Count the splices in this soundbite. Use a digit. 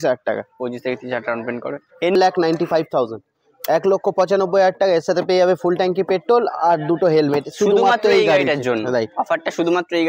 1